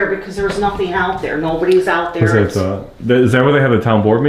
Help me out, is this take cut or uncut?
uncut